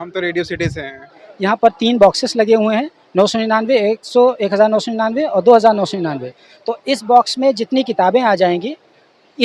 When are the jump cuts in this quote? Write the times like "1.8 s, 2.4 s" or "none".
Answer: 1.2 s

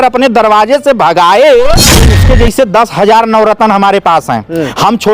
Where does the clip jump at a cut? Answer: 2.1 s

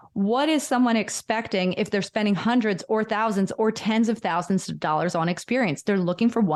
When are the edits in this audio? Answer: none

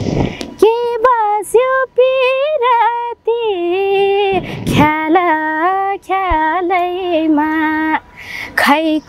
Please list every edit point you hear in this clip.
none

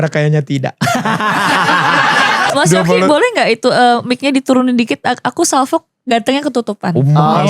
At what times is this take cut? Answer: 2.5 s

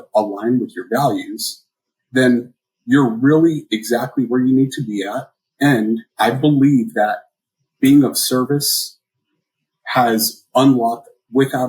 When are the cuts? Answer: 6.1 s

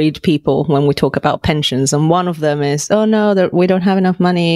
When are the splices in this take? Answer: none

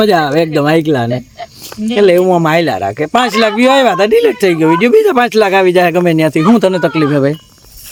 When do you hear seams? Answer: none

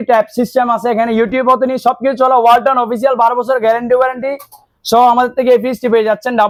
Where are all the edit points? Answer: none

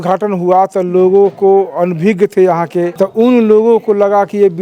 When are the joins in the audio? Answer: 2.9 s

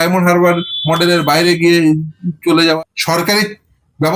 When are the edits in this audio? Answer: 2.6 s

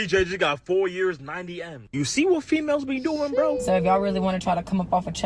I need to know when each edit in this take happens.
3.6 s

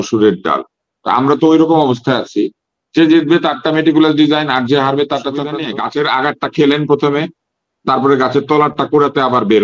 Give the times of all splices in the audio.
5.7 s

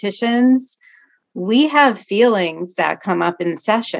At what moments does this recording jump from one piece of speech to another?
none

